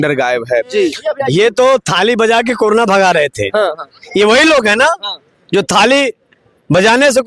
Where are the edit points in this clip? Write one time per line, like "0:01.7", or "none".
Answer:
0:01.1